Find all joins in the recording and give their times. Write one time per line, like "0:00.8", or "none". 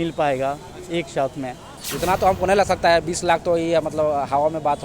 0:01.7